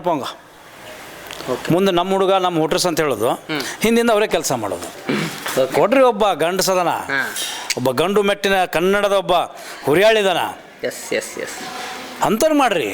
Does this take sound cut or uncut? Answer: cut